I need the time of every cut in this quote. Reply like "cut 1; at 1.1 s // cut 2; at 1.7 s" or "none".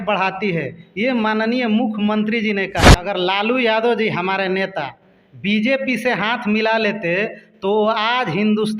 cut 1; at 3.0 s